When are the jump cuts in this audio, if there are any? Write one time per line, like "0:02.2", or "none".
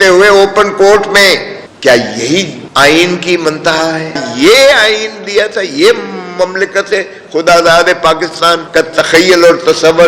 0:04.3
0:08.6